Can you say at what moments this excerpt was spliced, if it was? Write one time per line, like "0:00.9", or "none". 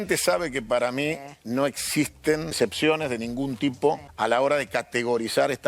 0:02.6
0:04.1